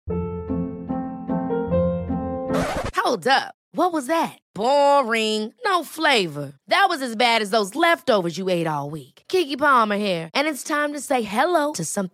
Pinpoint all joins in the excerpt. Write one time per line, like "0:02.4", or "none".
none